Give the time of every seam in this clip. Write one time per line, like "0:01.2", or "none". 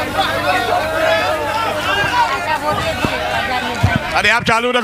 none